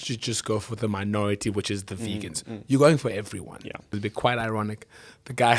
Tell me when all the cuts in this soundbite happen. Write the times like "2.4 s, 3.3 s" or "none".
4.0 s